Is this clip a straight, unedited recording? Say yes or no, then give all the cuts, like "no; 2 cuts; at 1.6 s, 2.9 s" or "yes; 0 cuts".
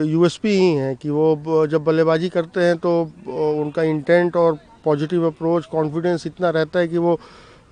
yes; 0 cuts